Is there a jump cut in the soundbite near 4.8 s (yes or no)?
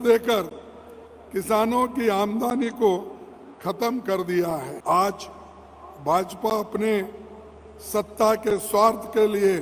yes